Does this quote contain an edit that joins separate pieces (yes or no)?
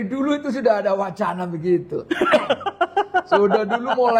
no